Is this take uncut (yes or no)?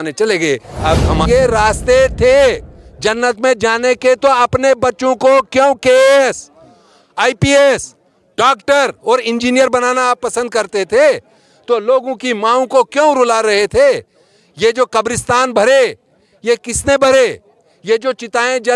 no